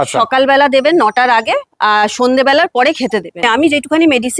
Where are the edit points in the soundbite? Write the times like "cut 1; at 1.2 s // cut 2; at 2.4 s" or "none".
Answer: cut 1; at 3.4 s